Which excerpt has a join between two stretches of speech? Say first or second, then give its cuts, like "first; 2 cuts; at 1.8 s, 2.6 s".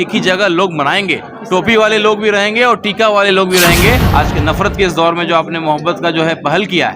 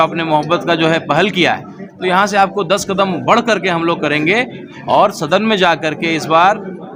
first; 1 cut; at 4.1 s